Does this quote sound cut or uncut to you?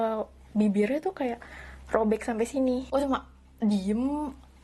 cut